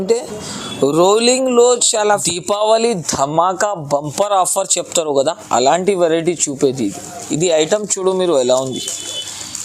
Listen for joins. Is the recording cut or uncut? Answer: cut